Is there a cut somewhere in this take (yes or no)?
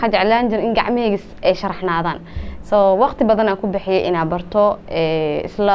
no